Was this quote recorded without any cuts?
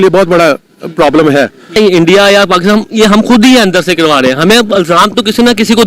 no; 1 cut; at 1.8 s

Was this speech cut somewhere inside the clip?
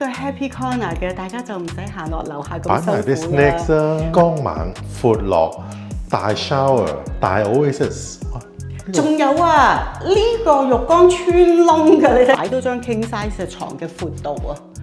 yes; 2 cuts; at 4.1 s, 12.4 s

